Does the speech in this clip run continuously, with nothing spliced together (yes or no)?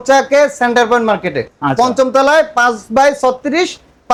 yes